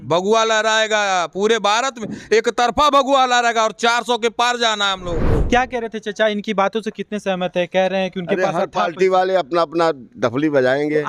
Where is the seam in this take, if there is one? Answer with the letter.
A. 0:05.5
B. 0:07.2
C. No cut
A